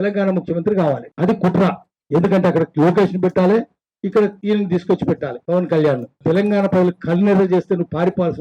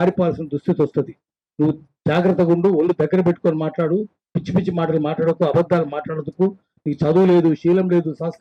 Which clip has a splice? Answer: first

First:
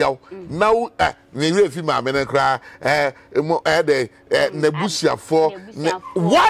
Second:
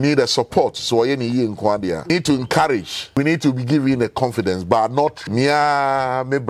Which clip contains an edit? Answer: second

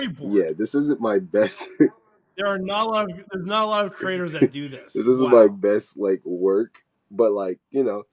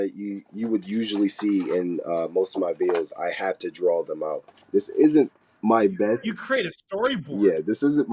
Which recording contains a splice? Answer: second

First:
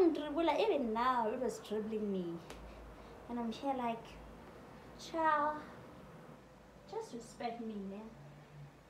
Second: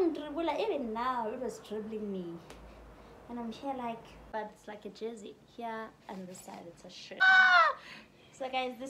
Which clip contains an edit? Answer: second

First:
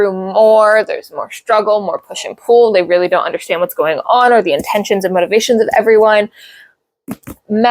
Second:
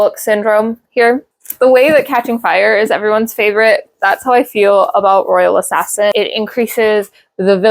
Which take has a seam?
second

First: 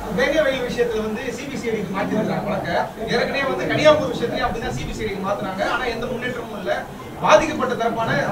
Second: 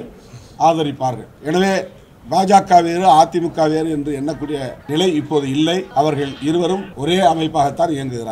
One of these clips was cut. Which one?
second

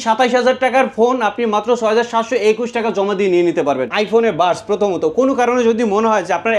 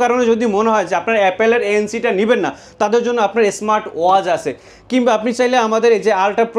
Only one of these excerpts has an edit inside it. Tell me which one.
first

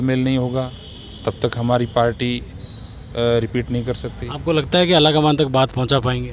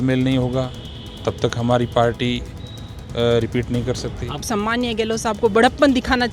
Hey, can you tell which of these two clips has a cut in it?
second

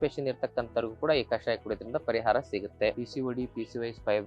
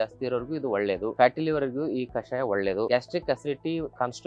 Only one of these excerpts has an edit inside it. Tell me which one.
first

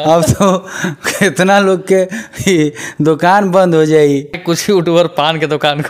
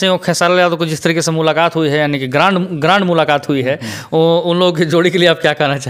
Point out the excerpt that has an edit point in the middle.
first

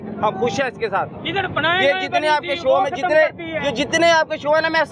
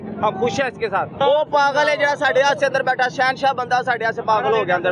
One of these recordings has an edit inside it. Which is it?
second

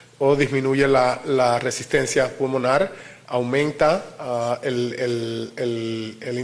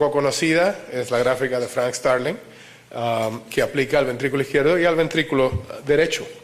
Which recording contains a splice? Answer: second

